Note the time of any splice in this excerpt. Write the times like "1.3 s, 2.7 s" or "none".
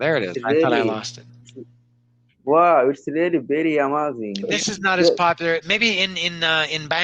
4.5 s